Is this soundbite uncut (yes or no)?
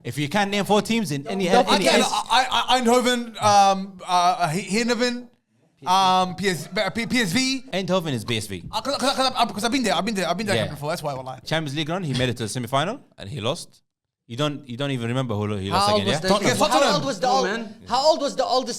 no